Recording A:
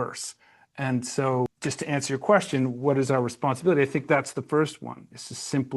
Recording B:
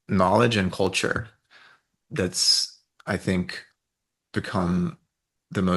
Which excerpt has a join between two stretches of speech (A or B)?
A